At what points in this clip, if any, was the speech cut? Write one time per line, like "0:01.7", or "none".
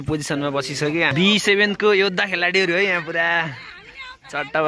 0:01.1